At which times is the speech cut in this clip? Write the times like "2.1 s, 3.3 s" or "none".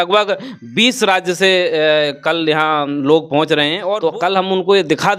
3.8 s